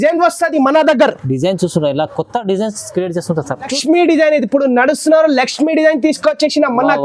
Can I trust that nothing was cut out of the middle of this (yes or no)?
no